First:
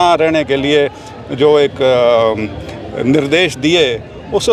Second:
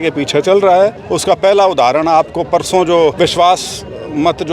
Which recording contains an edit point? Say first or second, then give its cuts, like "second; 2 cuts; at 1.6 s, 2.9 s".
second; 2 cuts; at 1.1 s, 3.1 s